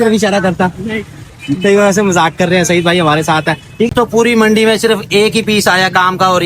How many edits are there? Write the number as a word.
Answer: one